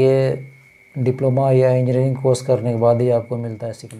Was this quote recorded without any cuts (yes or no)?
yes